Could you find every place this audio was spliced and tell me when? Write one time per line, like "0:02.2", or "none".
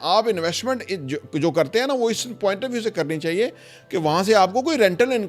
none